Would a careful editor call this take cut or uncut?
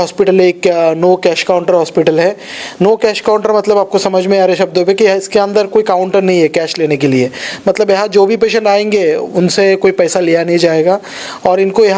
uncut